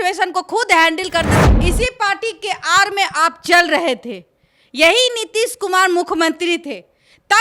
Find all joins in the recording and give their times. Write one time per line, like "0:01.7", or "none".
0:01.4

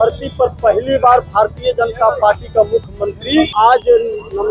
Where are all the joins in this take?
0:03.5

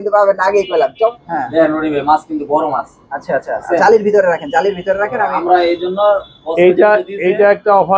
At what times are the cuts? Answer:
0:01.1

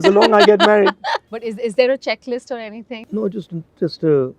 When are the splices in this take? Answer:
0:01.1
0:02.9

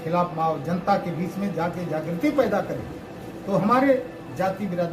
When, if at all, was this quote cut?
none

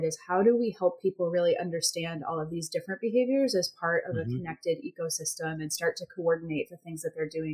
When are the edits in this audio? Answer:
none

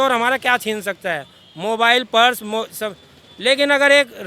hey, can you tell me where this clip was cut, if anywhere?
none

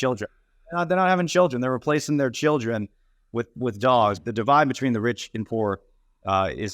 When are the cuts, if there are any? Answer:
0:04.2

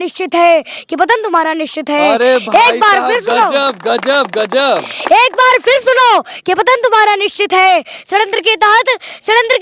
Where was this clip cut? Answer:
none

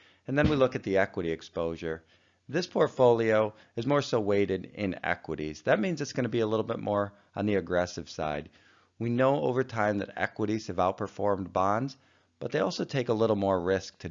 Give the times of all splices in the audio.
0:12.9

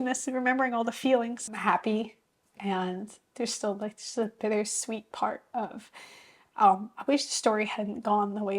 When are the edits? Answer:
0:01.5

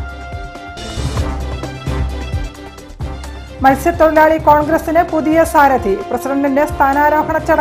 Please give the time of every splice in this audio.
0:03.1

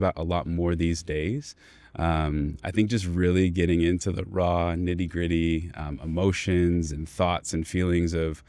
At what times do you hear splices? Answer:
none

